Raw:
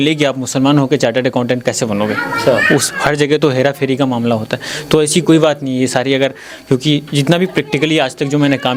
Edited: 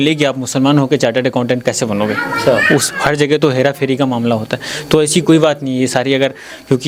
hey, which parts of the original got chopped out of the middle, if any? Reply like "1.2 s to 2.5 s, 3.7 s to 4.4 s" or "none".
none